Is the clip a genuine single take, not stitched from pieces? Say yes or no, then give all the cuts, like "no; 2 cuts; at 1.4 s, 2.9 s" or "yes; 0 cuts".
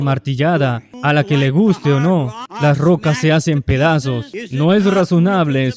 no; 3 cuts; at 0.9 s, 2.4 s, 4.4 s